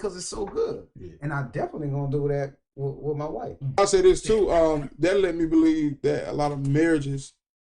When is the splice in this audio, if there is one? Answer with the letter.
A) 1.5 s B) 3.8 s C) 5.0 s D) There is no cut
B